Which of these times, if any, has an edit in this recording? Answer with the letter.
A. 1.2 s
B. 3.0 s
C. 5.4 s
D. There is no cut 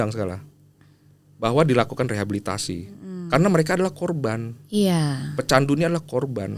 D